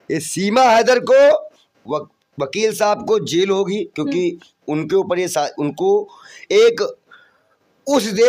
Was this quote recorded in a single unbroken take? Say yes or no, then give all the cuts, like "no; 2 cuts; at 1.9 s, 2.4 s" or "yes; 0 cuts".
yes; 0 cuts